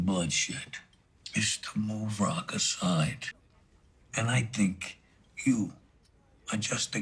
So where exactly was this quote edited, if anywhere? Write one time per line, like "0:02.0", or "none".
none